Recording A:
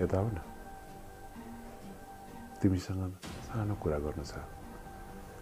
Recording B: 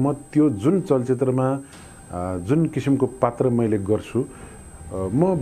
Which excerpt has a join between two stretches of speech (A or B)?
A